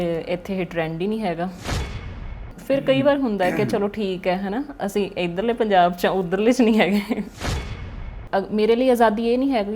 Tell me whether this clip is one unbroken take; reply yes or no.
no